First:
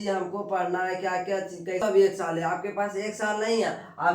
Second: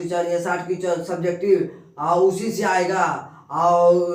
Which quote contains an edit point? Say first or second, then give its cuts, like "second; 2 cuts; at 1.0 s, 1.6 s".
first; 1 cut; at 1.8 s